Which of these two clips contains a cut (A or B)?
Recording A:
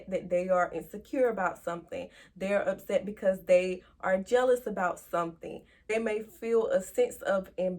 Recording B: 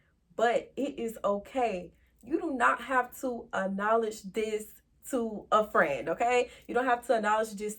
A